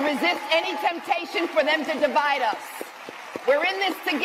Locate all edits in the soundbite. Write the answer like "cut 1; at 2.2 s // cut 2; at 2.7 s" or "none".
none